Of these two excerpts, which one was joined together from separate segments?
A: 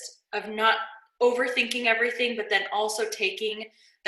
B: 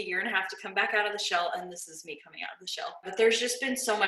B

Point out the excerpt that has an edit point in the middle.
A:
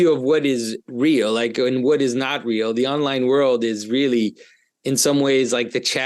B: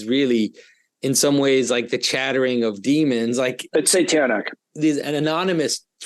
B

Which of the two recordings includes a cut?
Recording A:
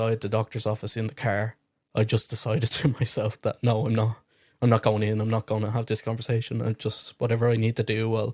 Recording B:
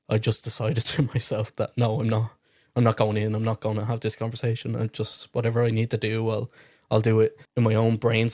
B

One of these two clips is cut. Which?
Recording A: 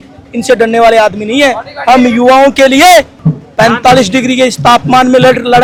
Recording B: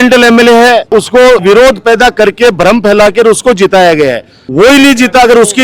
B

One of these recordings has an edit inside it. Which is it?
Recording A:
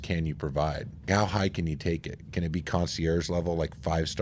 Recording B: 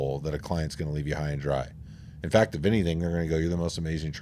A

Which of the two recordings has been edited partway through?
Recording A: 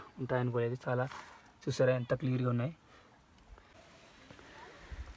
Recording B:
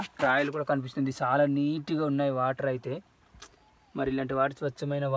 A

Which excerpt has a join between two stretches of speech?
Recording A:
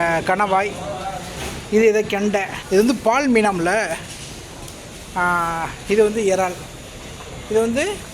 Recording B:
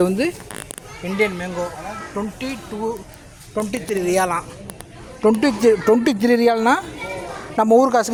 A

